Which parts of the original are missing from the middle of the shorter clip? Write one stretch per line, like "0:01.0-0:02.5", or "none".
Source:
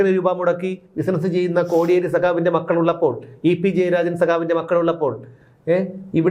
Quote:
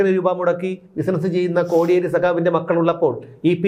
none